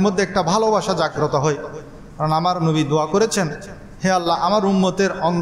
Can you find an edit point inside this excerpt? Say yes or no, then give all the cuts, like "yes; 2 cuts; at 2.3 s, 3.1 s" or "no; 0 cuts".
no; 0 cuts